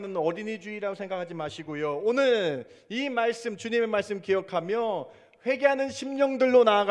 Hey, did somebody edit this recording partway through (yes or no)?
no